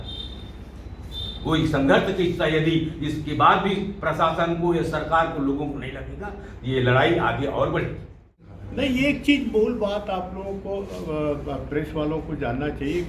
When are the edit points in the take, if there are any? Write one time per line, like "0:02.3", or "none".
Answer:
0:08.1